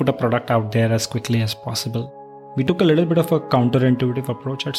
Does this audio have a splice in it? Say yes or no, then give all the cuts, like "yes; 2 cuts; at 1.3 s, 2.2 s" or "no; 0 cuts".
yes; 1 cut; at 2.6 s